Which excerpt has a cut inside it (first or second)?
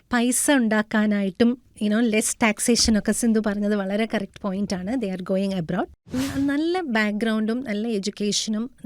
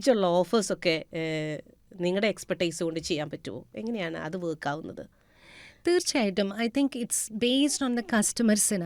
first